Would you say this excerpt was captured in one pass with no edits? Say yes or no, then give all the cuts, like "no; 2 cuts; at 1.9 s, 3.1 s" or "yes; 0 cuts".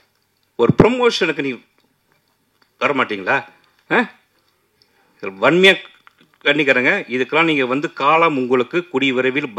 yes; 0 cuts